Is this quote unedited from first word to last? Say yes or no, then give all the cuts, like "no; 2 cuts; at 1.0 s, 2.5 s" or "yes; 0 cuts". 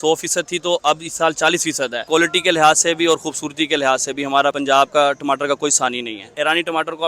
no; 3 cuts; at 2.0 s, 4.6 s, 6.3 s